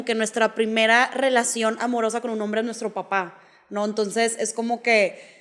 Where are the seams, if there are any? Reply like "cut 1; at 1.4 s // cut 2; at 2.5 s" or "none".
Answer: none